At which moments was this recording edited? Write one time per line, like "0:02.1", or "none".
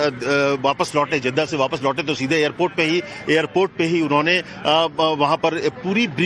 0:04.7